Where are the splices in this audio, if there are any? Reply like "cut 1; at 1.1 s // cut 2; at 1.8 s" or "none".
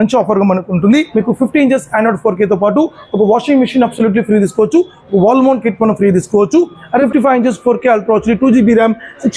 cut 1; at 1.1 s // cut 2; at 7.0 s